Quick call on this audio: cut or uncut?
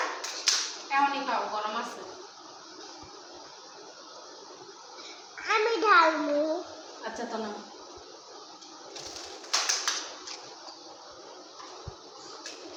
uncut